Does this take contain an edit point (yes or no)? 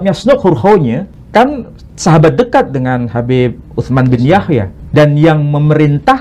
yes